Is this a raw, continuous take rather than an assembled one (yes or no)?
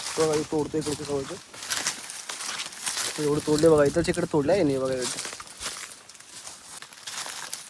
no